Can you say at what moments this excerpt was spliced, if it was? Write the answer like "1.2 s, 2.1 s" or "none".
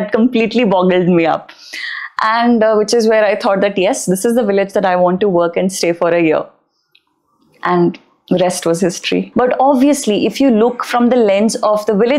9.3 s